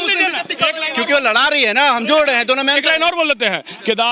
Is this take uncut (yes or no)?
yes